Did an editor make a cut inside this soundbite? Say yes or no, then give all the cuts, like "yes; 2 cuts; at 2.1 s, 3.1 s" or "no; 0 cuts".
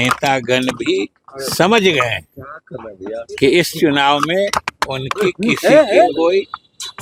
no; 0 cuts